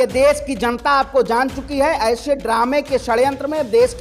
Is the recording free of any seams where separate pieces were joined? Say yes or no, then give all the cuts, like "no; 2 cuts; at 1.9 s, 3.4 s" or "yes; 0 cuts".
yes; 0 cuts